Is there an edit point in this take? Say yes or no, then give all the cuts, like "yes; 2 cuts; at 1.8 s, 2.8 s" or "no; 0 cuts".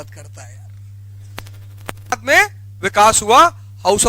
yes; 1 cut; at 2.1 s